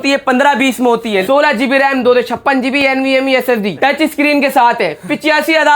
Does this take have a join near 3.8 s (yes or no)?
yes